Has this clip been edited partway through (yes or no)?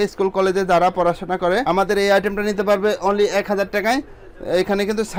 no